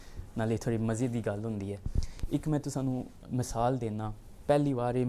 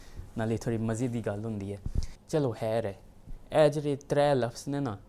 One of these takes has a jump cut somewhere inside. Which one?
second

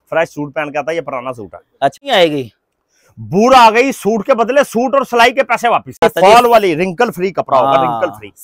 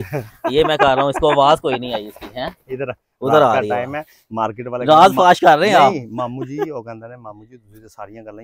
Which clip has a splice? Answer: first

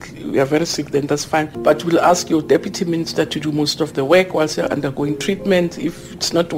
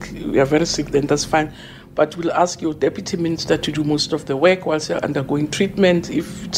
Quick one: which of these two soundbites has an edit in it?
first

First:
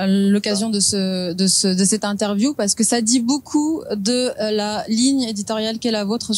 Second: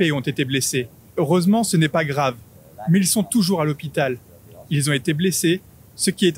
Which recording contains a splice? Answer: second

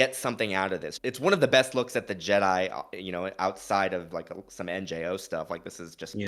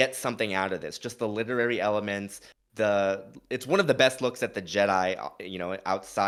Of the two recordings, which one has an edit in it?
first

